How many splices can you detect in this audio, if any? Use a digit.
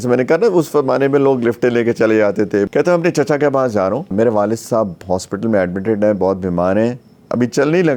3